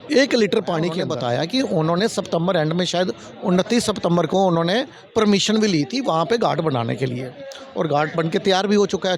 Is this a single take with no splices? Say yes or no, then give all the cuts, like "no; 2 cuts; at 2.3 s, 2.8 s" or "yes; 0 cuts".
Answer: no; 1 cut; at 1.0 s